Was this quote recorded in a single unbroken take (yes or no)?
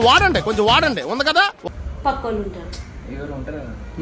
no